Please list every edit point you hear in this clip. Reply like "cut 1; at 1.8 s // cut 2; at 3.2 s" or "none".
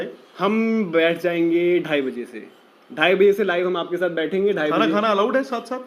cut 1; at 1.6 s

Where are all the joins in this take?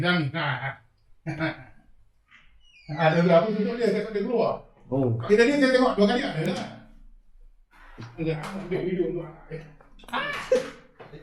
none

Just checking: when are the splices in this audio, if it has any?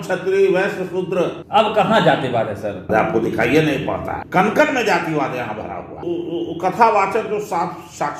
cut 1; at 1.4 s // cut 2; at 2.9 s // cut 3; at 4.2 s // cut 4; at 6.0 s

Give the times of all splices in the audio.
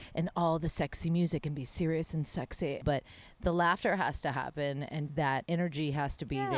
cut 1; at 2.8 s

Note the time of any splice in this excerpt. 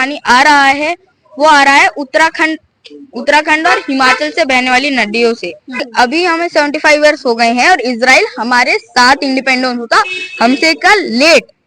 cut 1; at 5.8 s

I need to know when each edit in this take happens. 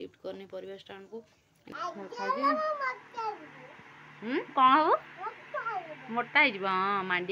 cut 1; at 1.7 s

